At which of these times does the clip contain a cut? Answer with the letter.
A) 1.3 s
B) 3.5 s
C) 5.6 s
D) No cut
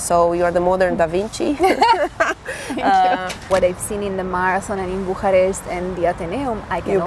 B